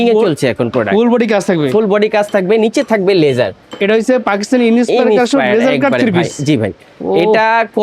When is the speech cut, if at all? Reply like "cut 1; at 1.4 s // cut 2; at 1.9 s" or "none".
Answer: cut 1; at 3.6 s